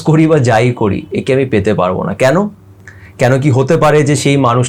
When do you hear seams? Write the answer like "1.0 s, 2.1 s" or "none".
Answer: none